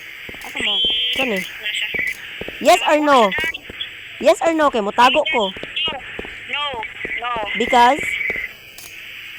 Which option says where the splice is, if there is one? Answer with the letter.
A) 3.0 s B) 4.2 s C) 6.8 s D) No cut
D